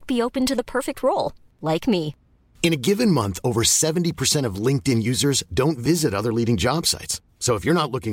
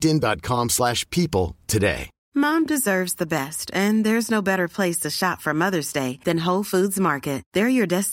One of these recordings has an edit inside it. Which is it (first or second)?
second